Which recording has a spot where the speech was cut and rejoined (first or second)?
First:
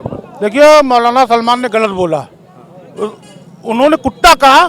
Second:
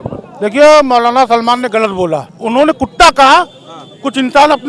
second